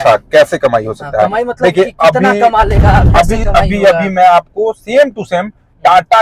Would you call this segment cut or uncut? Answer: uncut